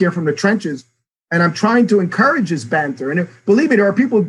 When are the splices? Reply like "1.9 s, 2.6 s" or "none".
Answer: none